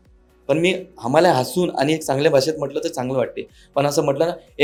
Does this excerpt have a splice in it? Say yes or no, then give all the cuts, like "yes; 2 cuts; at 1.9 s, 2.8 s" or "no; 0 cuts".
no; 0 cuts